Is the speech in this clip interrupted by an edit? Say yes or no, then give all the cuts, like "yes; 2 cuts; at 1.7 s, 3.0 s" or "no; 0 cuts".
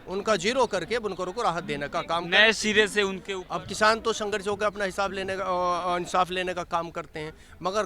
yes; 1 cut; at 3.3 s